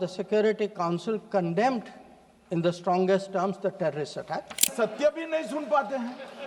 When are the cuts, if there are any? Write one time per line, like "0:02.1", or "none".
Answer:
0:04.7

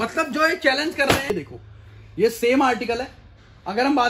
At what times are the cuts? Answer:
0:01.3

